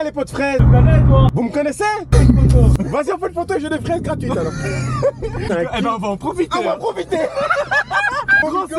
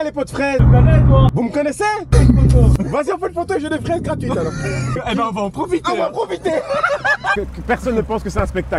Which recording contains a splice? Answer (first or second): second